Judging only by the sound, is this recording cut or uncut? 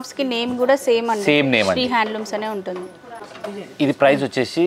uncut